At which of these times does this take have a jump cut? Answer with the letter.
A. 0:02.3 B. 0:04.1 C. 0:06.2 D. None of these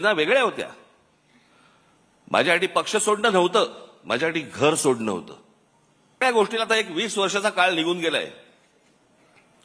C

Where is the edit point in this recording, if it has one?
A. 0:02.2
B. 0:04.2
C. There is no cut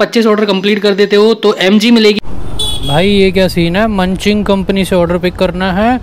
A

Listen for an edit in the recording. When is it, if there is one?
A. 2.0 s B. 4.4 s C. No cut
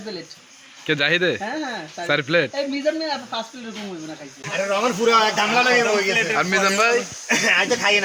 B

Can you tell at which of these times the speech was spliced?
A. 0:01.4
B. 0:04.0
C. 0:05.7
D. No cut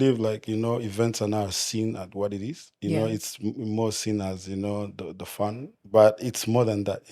C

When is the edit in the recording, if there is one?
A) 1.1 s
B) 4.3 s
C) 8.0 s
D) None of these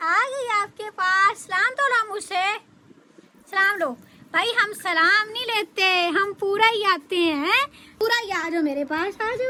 D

